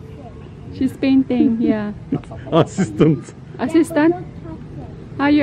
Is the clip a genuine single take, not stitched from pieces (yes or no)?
yes